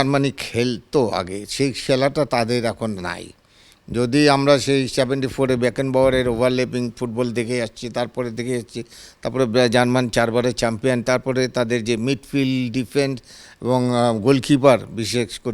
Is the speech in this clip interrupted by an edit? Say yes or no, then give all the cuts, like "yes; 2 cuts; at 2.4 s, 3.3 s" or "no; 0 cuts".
no; 0 cuts